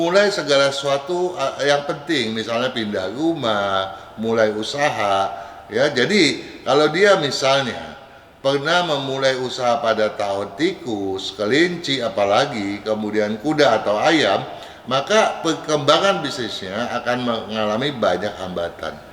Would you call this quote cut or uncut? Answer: uncut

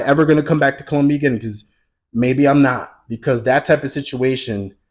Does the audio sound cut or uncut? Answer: uncut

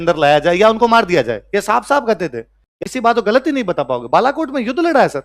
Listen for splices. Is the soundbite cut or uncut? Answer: cut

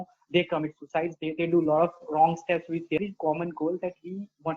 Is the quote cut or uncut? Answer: cut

